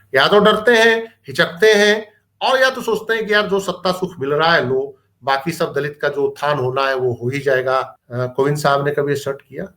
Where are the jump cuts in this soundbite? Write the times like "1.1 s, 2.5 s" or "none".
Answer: 8.0 s